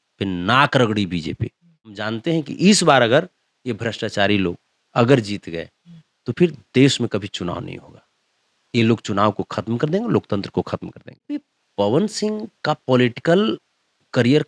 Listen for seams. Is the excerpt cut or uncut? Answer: cut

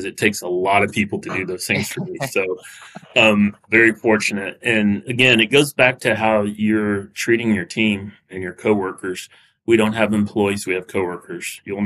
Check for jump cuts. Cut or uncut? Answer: cut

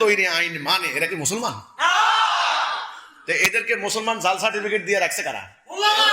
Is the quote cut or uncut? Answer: uncut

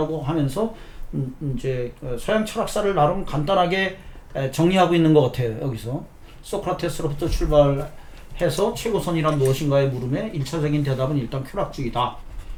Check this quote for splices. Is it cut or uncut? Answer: uncut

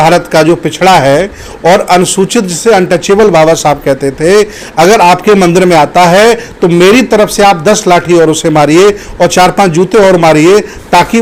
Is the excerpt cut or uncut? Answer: uncut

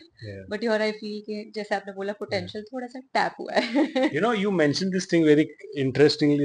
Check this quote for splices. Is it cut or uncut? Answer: uncut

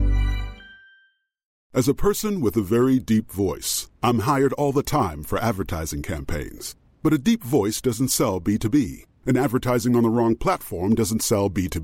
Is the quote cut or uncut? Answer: cut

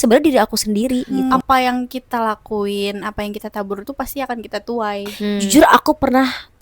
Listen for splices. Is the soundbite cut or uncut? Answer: cut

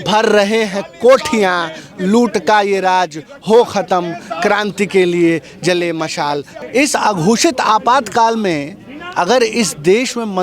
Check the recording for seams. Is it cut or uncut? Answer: cut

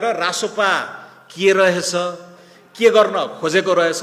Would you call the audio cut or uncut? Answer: uncut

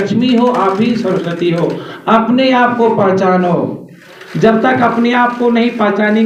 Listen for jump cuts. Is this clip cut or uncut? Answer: uncut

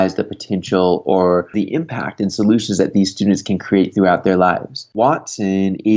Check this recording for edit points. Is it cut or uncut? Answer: cut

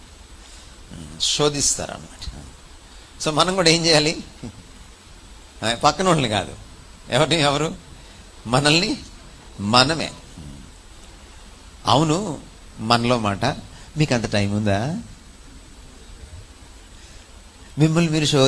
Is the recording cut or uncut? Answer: uncut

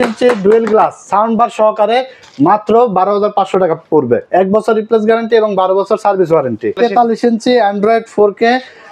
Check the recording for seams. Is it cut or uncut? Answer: cut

